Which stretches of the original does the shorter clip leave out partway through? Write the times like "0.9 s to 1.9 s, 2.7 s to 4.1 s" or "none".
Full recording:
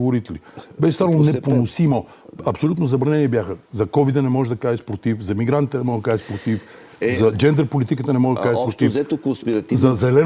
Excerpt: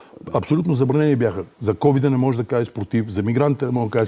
none